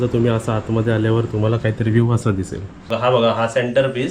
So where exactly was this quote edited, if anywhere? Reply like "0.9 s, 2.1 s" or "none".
2.9 s

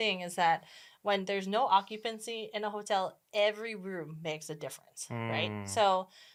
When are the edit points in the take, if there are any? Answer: none

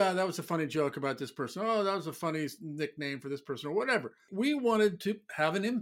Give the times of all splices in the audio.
none

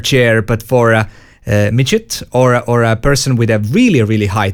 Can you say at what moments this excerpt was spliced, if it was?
none

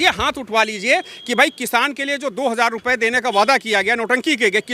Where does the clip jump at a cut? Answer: none

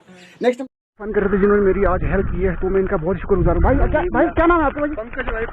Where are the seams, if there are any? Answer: 1.1 s

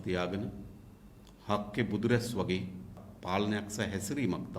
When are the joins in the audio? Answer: 3.1 s

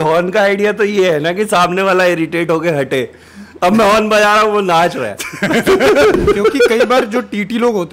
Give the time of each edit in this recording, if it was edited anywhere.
6.1 s

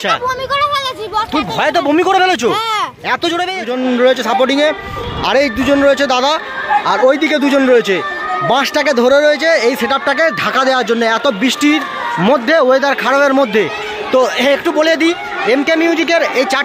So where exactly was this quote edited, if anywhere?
3.6 s

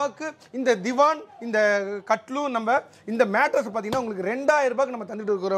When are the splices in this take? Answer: none

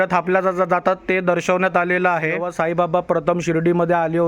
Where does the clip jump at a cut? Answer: 2.5 s

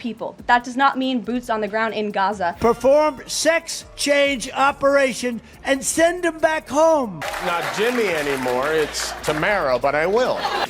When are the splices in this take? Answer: none

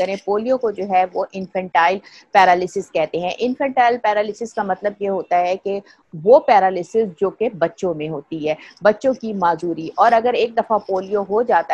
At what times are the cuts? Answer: none

